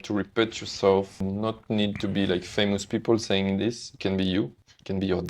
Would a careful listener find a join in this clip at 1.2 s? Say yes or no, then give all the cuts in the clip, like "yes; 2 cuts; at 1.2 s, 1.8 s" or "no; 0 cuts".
yes; 1 cut; at 1.2 s